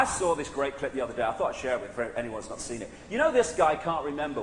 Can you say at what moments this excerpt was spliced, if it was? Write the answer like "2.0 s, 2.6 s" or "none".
none